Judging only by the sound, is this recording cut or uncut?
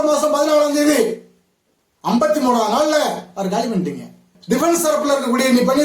cut